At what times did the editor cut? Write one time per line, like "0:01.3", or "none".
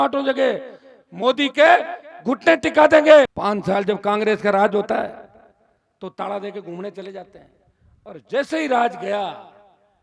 0:03.3